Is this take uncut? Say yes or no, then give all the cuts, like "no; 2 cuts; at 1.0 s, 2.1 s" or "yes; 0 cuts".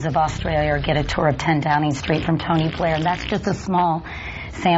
no; 1 cut; at 2.0 s